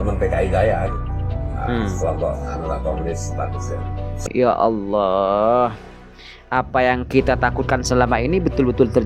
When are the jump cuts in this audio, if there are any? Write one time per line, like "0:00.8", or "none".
0:04.2